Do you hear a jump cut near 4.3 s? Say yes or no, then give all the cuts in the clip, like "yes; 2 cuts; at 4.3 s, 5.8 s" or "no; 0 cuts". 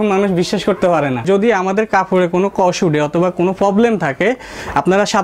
no; 1 cut; at 1.2 s